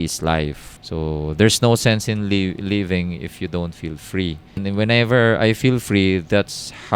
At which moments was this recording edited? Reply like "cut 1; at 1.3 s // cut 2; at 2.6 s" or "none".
cut 1; at 4.6 s